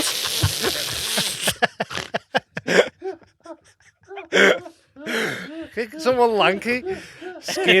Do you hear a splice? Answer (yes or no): no